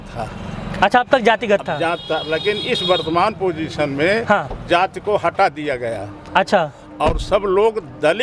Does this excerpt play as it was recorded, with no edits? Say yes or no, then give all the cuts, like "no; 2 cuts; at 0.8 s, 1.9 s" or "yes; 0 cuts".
yes; 0 cuts